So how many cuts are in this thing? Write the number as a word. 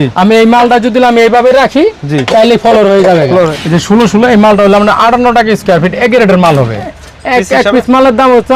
two